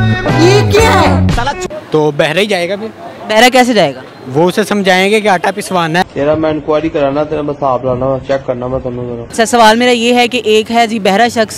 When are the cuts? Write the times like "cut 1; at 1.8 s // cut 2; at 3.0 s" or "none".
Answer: cut 1; at 1.7 s // cut 2; at 9.1 s